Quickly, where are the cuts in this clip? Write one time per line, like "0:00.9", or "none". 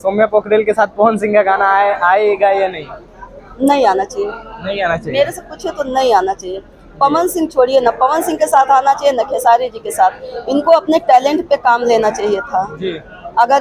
none